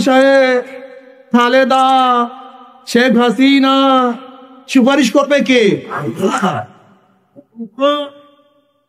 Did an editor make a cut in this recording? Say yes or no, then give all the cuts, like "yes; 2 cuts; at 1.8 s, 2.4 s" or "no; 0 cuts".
no; 0 cuts